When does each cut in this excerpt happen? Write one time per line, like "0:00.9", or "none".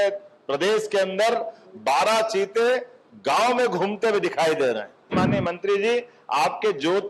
0:05.2